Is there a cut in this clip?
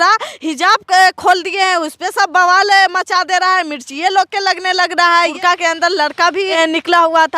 yes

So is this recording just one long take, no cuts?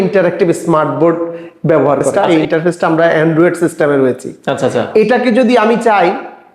no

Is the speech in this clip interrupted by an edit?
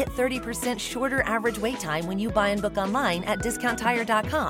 no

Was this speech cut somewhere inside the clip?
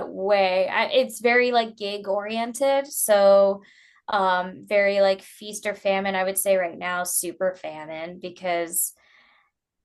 no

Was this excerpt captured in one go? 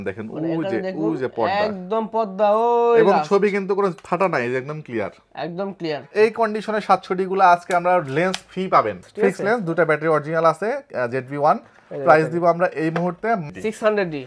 no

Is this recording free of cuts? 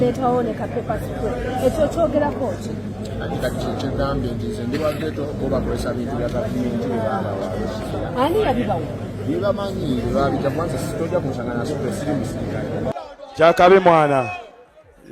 no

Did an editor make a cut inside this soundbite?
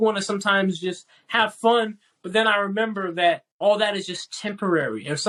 no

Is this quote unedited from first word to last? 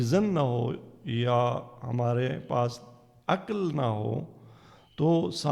yes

